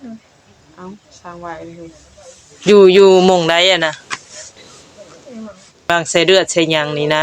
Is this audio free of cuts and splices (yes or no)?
no